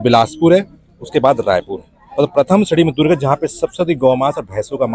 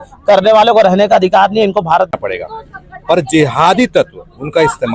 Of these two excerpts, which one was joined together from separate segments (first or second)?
second